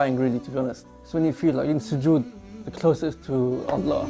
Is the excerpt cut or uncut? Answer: cut